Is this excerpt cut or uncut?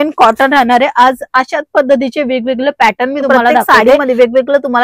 cut